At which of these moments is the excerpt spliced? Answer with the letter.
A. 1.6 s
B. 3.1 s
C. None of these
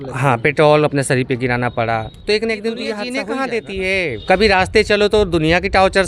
B